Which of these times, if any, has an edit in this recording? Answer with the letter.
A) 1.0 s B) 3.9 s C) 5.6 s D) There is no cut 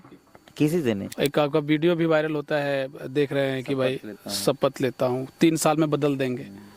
A